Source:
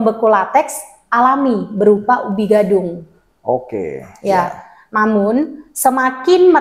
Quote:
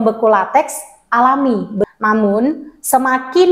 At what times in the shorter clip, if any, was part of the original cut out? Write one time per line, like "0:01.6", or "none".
0:01.8